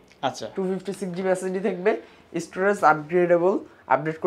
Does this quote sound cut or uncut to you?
uncut